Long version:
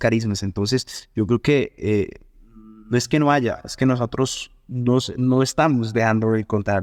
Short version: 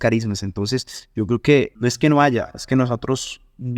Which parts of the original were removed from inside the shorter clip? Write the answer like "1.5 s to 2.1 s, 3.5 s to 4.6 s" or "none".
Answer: 1.7 s to 2.8 s